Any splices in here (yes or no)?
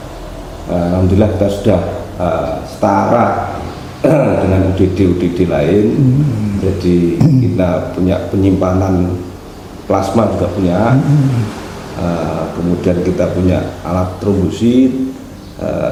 no